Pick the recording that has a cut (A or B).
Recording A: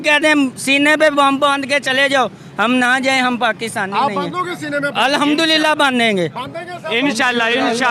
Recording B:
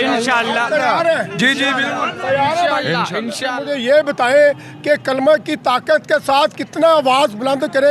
B